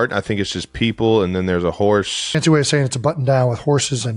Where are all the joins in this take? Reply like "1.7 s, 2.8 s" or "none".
2.3 s